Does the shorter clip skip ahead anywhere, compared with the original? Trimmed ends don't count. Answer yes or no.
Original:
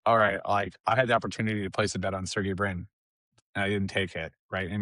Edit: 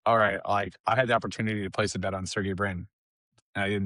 no